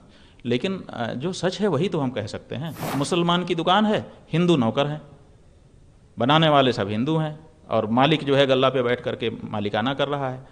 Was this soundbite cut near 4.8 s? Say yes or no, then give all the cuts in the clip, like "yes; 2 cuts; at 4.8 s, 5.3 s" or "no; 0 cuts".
no; 1 cut; at 2.8 s